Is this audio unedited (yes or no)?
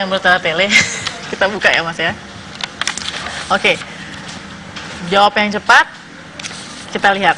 yes